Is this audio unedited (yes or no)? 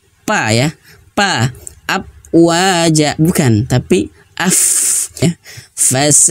no